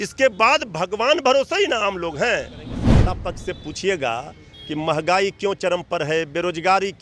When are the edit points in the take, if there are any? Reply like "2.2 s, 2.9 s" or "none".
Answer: 2.8 s